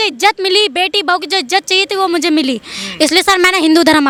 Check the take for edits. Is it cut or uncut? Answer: uncut